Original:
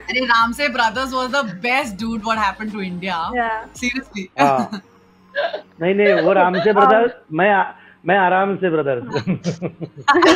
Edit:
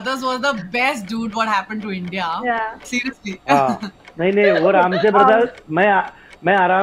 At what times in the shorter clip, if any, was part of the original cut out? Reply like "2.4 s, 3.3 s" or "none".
4.0 s